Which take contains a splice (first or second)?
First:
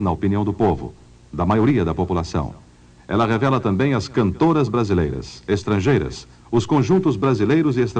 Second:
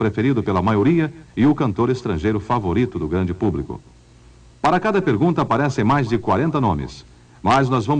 second